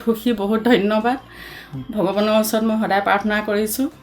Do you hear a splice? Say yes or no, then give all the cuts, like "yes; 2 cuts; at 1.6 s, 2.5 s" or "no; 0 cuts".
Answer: no; 0 cuts